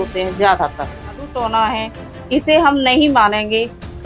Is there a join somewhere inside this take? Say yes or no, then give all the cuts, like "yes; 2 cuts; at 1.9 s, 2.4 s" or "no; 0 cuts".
yes; 1 cut; at 1.3 s